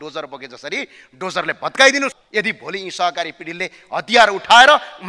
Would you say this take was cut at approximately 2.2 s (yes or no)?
yes